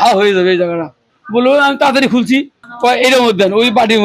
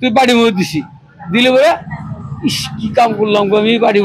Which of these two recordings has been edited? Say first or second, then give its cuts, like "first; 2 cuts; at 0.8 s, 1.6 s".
first; 2 cuts; at 1.1 s, 2.6 s